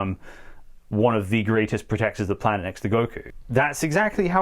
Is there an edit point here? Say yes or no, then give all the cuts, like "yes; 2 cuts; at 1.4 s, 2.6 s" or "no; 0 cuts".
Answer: yes; 1 cut; at 3.3 s